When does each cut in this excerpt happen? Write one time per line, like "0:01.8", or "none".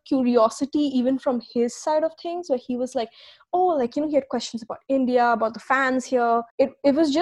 none